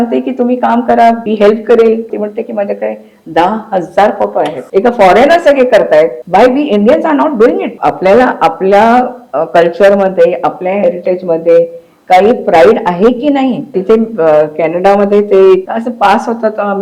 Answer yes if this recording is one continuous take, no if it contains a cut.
no